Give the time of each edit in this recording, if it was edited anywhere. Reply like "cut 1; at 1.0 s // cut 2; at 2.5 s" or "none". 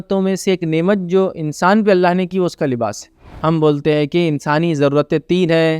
cut 1; at 3.3 s